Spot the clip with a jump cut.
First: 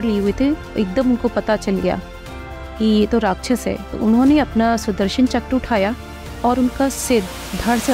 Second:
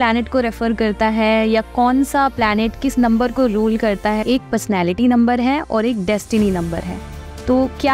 second; 1 cut; at 4.2 s

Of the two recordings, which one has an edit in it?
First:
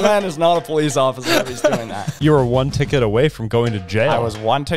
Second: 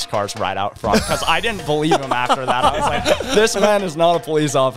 first; 1 cut; at 2.1 s

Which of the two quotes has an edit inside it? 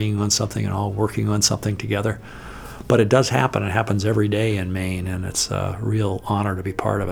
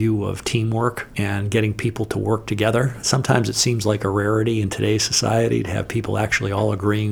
second; 2 cuts; at 1.1 s, 3.0 s

